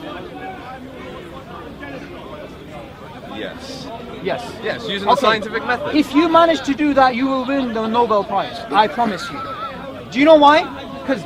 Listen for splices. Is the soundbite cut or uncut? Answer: uncut